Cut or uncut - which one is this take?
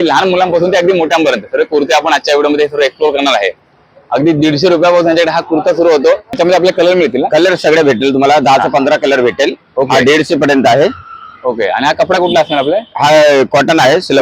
cut